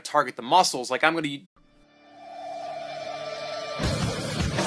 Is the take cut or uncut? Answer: uncut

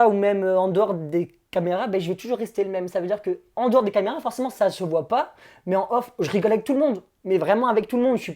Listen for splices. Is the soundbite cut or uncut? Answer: uncut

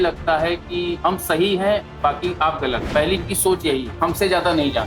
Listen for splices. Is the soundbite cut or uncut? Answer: cut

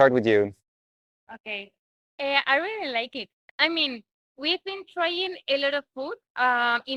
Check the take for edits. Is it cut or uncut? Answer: uncut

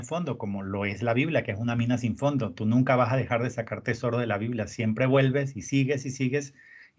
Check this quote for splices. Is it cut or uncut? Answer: uncut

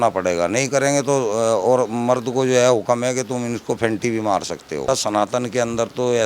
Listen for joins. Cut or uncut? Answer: cut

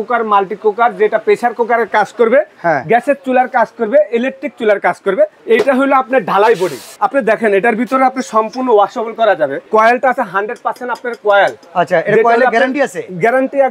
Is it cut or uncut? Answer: cut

